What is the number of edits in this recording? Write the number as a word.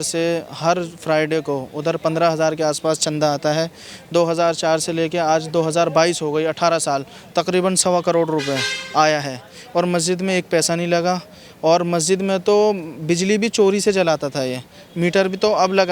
zero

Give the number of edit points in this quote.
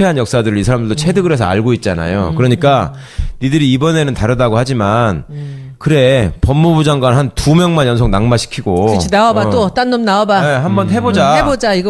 one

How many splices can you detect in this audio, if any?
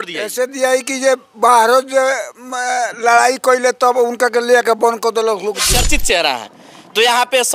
one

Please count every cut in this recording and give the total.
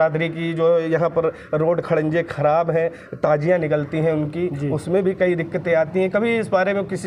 zero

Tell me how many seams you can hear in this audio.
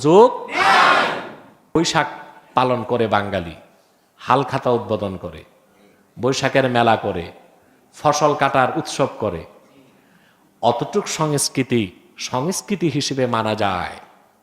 one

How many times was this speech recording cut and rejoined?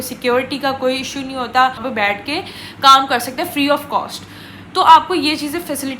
one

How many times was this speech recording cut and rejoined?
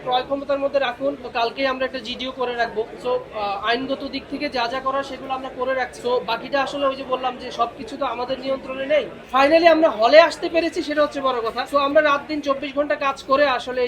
five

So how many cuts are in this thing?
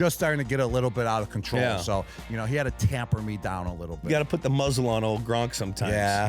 one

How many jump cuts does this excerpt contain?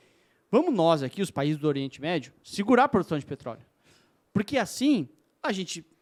zero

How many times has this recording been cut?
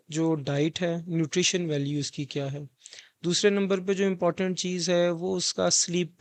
zero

